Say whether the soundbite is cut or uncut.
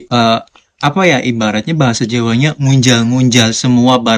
uncut